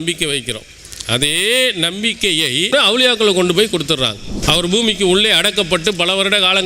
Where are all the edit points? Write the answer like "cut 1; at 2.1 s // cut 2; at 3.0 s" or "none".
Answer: cut 1; at 2.7 s // cut 2; at 4.3 s